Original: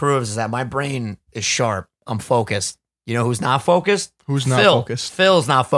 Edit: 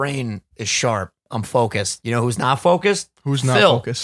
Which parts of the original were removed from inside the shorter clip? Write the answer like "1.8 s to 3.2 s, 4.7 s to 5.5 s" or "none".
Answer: 2.7 s to 3.0 s